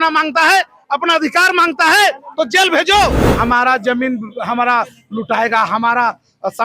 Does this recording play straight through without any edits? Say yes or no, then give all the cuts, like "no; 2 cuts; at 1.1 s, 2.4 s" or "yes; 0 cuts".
no; 1 cut; at 3.3 s